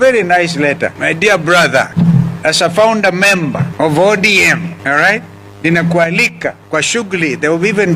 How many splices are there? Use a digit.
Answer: 5